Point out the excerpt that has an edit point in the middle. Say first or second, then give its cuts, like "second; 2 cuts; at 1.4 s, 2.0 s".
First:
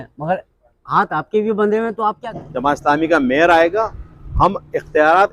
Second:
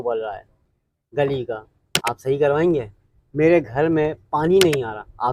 first; 1 cut; at 2.3 s